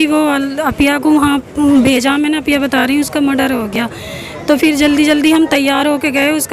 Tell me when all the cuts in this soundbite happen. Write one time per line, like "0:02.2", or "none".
none